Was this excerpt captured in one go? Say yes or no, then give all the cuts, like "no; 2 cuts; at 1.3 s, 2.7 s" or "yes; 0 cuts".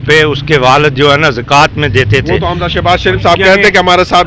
yes; 0 cuts